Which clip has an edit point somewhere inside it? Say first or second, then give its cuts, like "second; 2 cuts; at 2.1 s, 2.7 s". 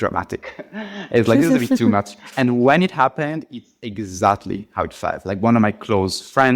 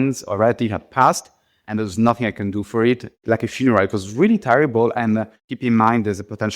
second; 2 cuts; at 3.1 s, 5.3 s